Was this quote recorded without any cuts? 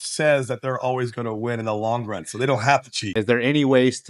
no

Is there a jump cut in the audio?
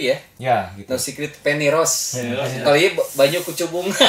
no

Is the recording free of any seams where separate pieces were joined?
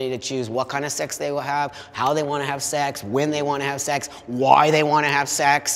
yes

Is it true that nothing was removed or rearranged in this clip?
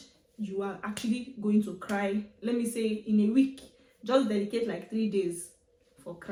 yes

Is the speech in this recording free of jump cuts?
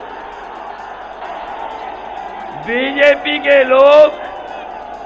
no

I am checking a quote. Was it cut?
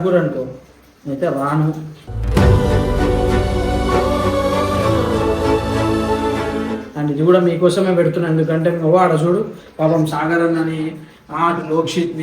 no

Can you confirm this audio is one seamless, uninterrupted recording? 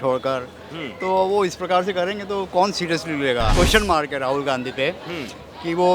no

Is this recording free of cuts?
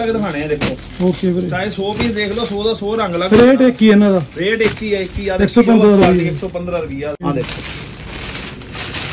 no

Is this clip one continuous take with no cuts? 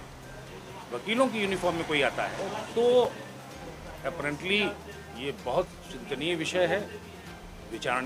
yes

